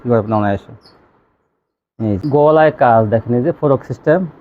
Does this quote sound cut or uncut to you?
cut